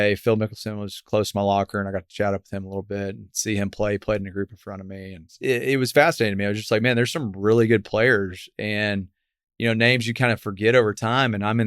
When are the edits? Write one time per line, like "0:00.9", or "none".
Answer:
0:05.3